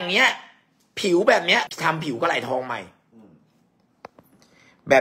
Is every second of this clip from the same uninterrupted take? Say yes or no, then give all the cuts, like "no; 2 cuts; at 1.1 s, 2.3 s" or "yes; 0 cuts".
no; 1 cut; at 1.7 s